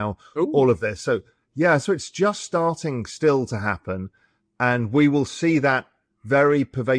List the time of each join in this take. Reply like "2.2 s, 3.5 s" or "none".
none